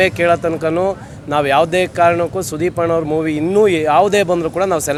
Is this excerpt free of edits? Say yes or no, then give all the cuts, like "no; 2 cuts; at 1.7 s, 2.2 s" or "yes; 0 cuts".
yes; 0 cuts